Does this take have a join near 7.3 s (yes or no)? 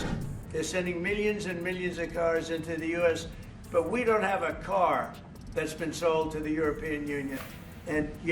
yes